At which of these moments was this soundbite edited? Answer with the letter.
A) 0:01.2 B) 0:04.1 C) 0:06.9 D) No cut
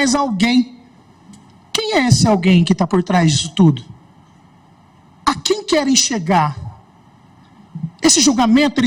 D